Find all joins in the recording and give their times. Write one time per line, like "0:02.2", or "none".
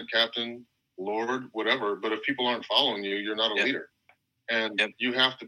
0:04.1